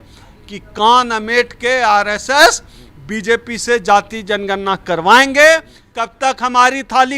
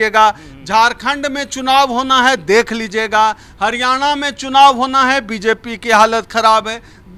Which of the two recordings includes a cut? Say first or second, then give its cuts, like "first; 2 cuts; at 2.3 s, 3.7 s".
first; 1 cut; at 5.8 s